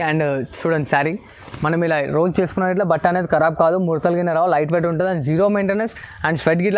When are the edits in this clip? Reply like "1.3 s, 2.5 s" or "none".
none